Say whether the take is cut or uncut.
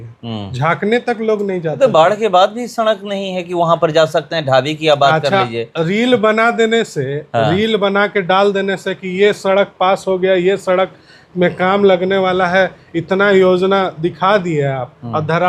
uncut